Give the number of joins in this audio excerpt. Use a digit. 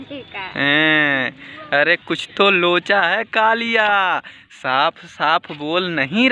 0